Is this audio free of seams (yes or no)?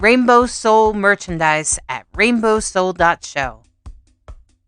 yes